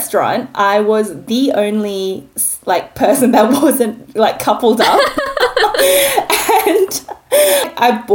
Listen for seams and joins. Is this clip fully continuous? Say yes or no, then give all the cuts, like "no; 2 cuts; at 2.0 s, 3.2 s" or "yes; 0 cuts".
yes; 0 cuts